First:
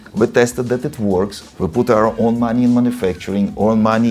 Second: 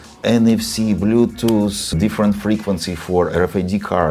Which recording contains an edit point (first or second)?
second